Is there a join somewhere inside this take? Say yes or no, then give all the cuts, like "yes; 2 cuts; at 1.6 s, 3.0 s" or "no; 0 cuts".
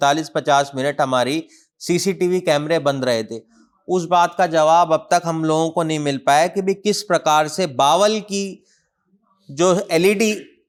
no; 0 cuts